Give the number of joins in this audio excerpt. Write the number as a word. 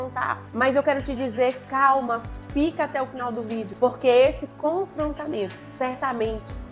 one